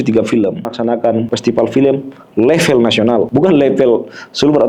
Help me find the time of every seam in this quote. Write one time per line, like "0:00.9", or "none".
0:01.1
0:03.3